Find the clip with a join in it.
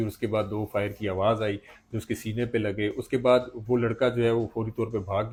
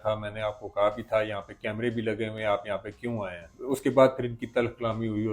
second; 1 cut; at 3.5 s

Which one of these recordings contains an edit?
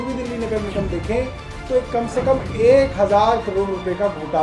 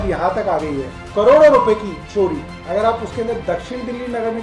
second; 2 cuts; at 1.0 s, 2.4 s

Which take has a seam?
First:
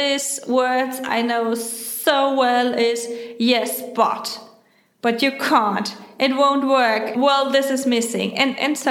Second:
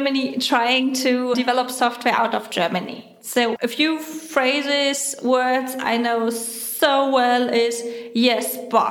second; 2 cuts; at 1.3 s, 3.5 s

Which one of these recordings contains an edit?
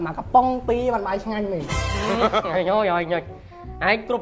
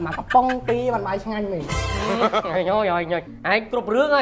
second; 1 cut; at 3.3 s

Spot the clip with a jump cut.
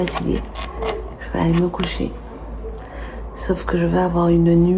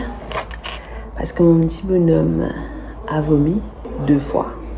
second; 1 cut; at 3.8 s

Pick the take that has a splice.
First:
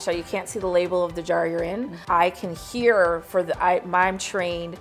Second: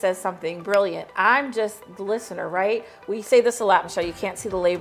first; 1 cut; at 1.9 s

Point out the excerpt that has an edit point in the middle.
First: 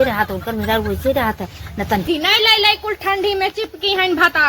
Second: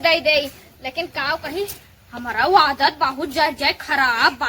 first; 1 cut; at 2.1 s

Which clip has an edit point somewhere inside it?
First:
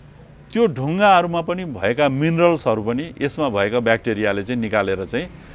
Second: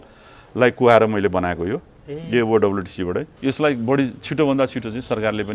second; 1 cut; at 3.3 s

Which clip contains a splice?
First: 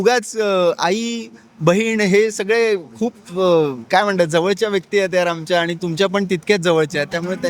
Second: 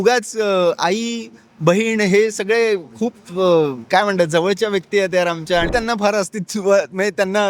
second; 1 cut; at 5.7 s

